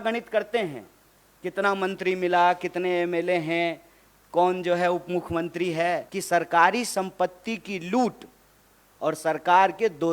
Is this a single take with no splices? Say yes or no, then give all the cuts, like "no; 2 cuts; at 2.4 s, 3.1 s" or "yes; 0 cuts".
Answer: no; 1 cut; at 6.1 s